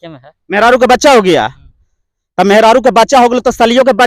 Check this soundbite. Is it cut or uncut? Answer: uncut